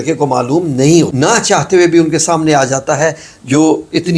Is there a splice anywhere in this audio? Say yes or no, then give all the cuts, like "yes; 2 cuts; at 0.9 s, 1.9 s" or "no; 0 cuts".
yes; 1 cut; at 1.1 s